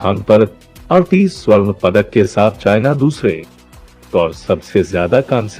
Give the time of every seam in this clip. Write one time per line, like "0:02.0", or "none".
0:03.9